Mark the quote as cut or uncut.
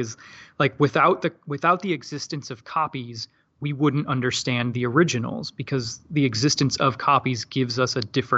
uncut